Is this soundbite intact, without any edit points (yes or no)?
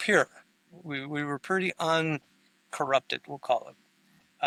yes